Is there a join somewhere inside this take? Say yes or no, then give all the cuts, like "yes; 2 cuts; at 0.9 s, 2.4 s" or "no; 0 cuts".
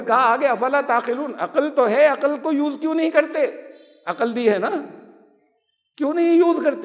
no; 0 cuts